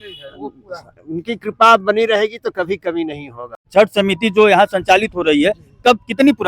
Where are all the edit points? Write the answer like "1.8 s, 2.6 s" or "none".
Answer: 3.6 s